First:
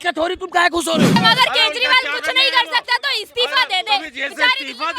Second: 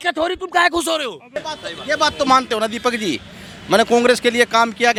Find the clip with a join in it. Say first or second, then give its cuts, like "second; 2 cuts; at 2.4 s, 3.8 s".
first; 1 cut; at 1.2 s